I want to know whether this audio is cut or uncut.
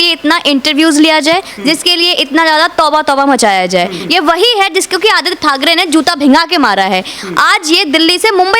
cut